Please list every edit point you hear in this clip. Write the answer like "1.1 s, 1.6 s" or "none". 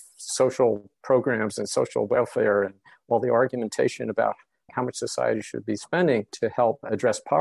4.7 s